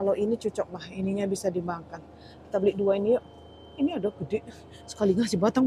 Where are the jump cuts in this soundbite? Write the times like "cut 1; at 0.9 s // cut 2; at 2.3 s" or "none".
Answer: none